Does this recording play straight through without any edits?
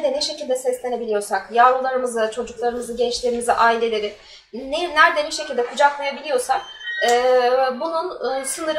yes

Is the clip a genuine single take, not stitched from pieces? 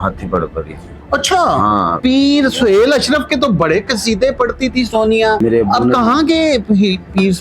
no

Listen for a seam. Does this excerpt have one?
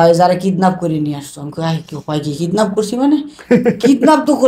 no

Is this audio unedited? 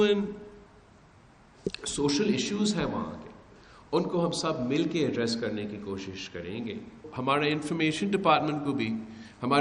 no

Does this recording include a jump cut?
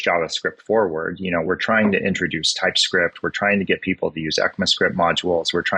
no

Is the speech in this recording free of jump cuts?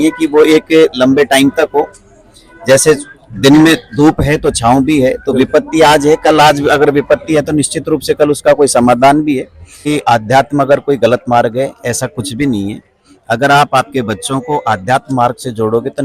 no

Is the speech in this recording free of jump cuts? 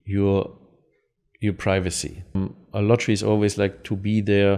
no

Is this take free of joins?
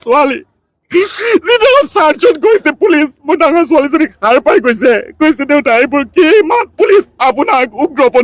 yes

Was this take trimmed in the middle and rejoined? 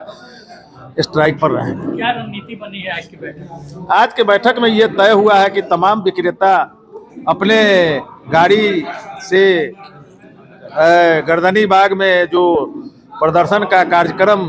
no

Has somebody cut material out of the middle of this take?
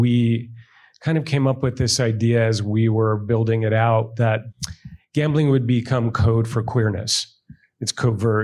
yes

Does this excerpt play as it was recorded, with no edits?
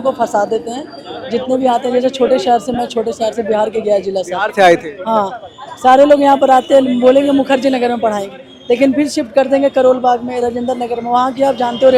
yes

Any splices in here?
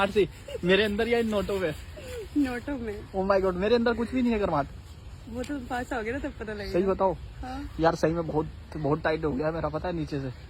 no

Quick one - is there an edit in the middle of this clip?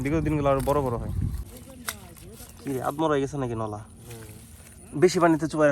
yes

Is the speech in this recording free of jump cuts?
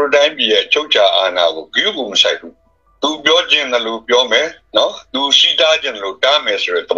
yes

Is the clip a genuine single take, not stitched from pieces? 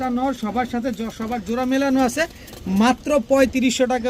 yes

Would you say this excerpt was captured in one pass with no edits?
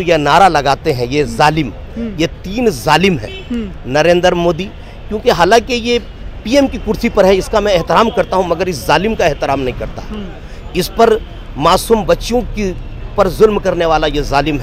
yes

